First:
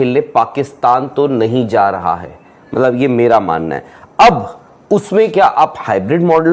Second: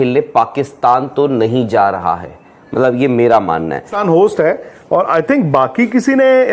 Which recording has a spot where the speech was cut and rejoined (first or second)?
second